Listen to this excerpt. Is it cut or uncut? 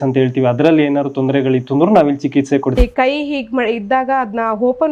cut